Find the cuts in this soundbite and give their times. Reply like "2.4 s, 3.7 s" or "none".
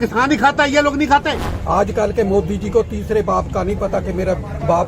1.5 s